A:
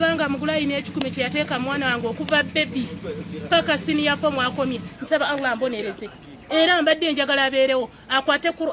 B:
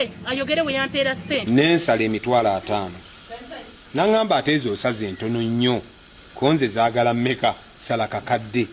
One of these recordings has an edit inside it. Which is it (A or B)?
B